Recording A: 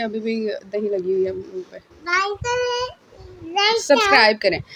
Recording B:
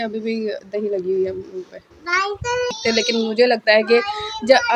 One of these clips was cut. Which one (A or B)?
B